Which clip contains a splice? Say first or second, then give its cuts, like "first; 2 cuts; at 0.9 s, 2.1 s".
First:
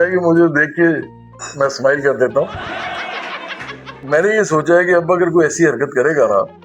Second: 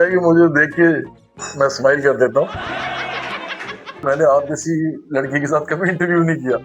second; 1 cut; at 4.0 s